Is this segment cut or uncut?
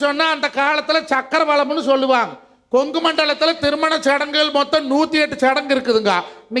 uncut